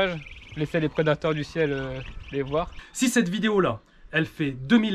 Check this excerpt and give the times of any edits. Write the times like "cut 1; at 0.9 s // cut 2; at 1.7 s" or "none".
cut 1; at 2.8 s